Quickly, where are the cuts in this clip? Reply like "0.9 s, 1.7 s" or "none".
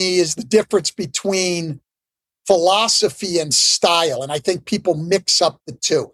none